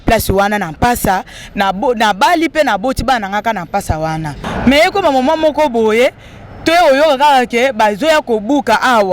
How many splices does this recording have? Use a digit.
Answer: 1